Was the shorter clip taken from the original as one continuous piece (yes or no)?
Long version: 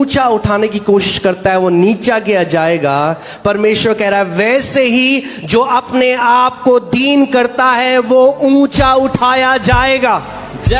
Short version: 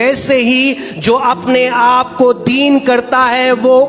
yes